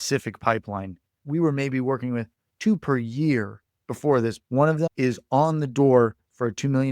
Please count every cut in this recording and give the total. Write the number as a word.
two